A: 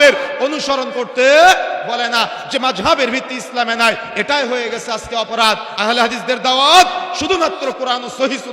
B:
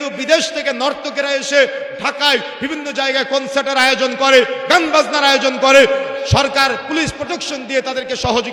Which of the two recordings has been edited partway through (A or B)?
A